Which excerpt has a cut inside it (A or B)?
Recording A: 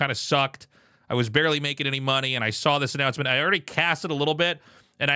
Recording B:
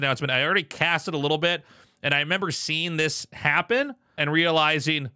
B